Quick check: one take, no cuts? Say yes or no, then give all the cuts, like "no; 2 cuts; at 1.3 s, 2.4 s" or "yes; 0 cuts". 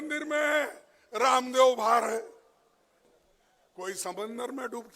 no; 1 cut; at 3.0 s